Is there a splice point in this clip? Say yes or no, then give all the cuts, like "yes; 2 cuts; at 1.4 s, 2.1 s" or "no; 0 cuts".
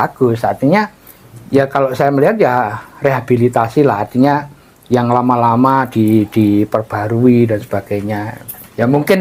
no; 0 cuts